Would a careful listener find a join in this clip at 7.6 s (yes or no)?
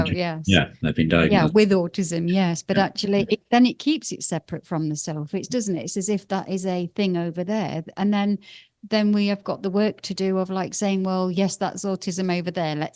no